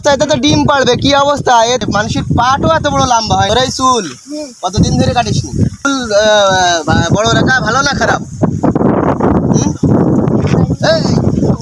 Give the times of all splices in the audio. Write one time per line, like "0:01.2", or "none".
0:01.8
0:03.5
0:05.9